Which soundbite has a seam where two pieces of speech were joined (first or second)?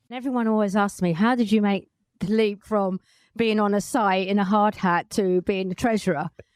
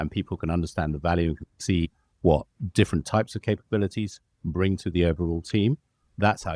second